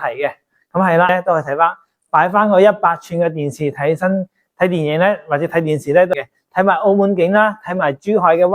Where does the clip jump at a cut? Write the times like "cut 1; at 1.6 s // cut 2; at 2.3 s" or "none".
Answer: cut 1; at 1.1 s // cut 2; at 6.1 s